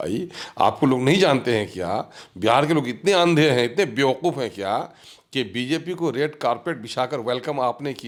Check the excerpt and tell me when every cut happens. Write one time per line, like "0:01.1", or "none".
none